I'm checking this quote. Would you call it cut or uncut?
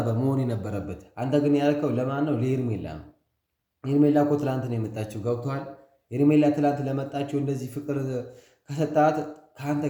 uncut